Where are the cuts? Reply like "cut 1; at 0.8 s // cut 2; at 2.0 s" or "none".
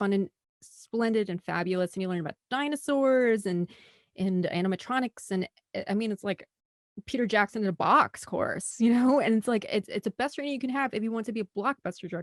none